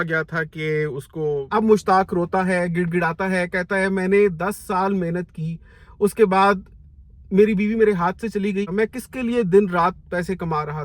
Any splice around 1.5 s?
yes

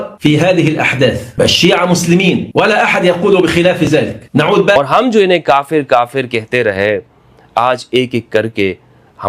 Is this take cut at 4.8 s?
yes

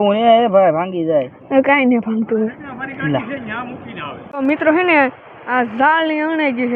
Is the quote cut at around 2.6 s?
no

